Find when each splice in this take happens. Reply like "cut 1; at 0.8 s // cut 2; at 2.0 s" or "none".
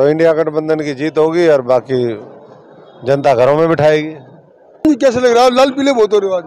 cut 1; at 4.8 s